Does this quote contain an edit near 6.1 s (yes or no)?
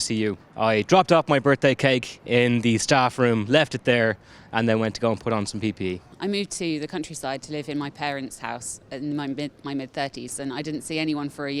yes